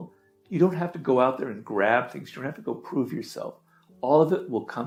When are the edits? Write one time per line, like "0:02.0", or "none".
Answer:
none